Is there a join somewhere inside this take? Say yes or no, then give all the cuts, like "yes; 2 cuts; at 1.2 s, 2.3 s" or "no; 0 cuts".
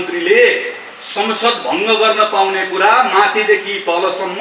no; 0 cuts